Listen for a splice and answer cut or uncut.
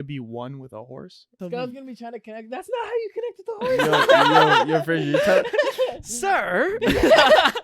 cut